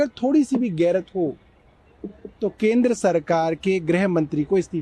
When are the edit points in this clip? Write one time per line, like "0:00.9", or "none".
none